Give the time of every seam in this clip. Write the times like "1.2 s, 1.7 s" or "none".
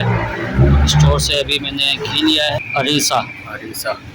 2.6 s